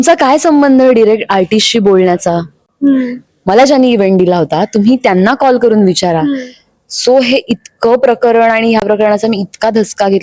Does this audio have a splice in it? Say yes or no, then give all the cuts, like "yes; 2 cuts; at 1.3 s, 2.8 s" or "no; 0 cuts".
no; 0 cuts